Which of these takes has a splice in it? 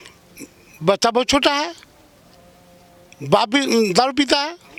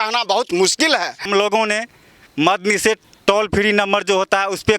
second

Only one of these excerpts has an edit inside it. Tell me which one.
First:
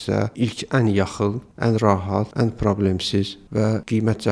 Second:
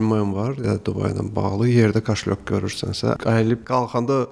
first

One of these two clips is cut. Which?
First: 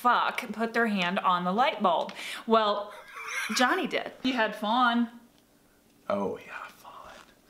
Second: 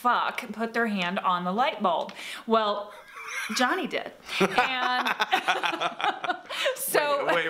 first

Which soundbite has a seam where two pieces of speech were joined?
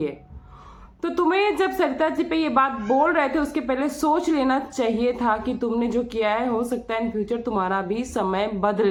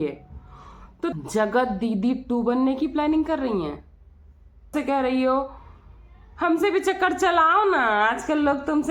second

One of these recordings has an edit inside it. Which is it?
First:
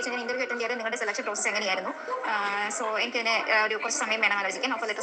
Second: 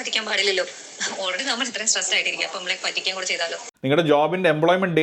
second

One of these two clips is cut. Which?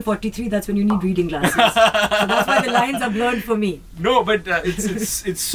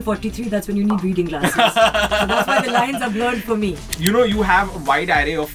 second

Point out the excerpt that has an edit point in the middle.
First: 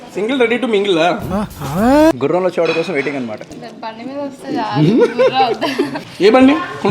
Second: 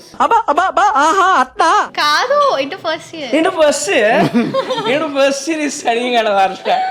first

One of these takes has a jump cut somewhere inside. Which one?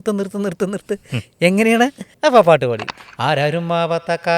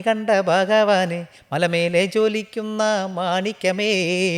first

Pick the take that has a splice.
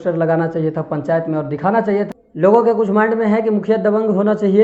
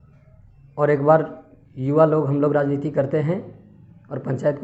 first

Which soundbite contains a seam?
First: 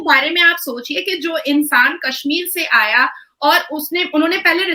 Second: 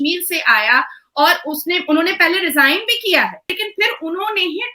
second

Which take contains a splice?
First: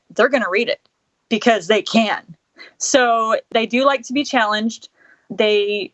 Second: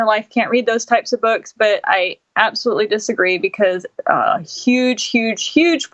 first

